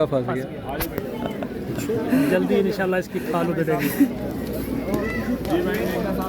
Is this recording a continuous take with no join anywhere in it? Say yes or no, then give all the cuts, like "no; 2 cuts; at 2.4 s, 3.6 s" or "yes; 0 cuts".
no; 1 cut; at 4.1 s